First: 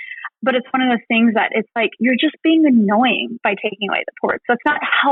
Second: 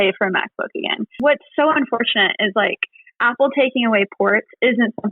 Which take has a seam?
second; 1 cut; at 1.0 s

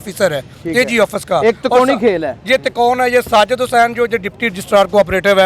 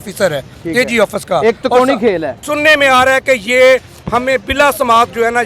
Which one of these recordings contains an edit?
second; 1 cut; at 2.3 s

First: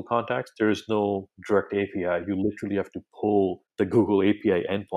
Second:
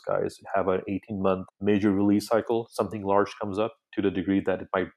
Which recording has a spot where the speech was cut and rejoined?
first; 1 cut; at 3.6 s

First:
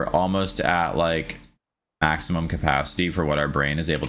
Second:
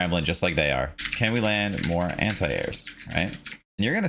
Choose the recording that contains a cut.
second; 1 cut; at 1.0 s

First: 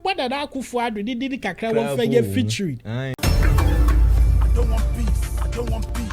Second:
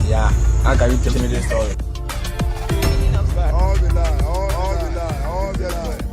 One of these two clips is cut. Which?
first; 1 cut; at 3.2 s

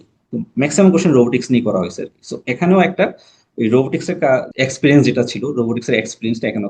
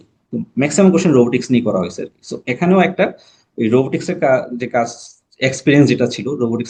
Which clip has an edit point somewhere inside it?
first; 1 cut; at 4.5 s

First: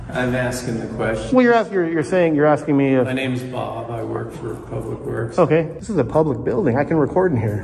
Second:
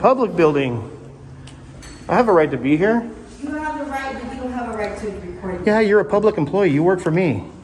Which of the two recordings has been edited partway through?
first; 1 cut; at 5.7 s

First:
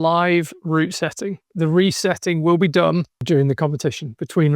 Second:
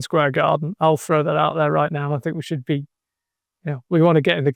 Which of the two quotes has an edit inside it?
first; 2 cuts; at 1.5 s, 3.2 s

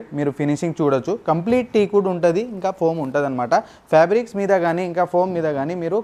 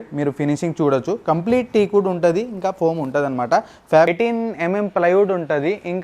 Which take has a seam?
second; 1 cut; at 4.1 s

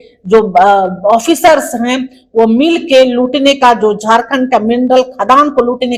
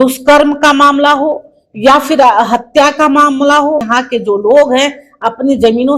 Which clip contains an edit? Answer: second; 1 cut; at 3.9 s

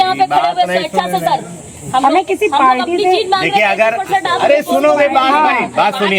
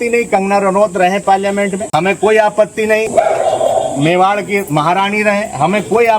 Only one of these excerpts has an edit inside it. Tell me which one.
second; 2 cuts; at 1.8 s, 3.1 s

